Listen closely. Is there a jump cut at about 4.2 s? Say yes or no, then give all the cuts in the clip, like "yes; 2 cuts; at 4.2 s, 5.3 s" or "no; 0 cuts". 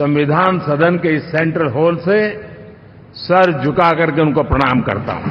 no; 0 cuts